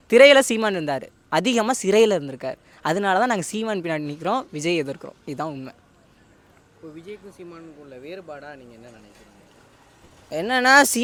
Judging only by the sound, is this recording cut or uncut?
uncut